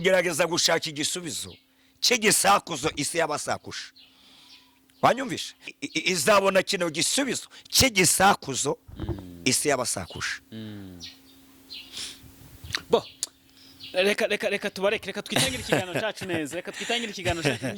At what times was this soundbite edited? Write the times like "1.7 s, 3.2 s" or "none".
5.9 s